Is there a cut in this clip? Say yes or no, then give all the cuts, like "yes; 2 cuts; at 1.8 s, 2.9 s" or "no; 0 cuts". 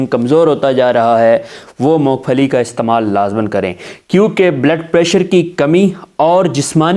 no; 0 cuts